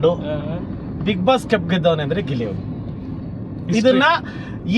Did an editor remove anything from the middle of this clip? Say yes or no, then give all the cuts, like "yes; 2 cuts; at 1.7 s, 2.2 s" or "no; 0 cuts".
no; 0 cuts